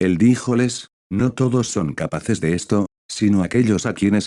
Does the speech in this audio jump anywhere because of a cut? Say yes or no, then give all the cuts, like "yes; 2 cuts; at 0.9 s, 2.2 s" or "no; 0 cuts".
yes; 1 cut; at 3.0 s